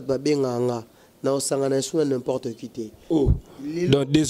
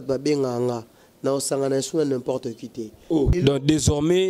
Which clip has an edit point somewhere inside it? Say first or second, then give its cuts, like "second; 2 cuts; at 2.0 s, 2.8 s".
second; 1 cut; at 3.3 s